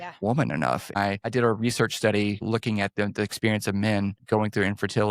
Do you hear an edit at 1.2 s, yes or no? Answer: yes